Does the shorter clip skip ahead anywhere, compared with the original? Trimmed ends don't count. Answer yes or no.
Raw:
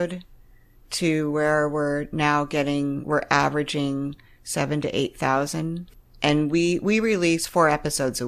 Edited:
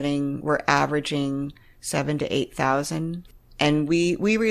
no